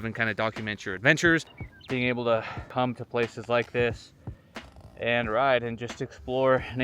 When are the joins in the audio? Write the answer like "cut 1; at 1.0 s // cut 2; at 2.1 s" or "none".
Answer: cut 1; at 1.4 s // cut 2; at 2.6 s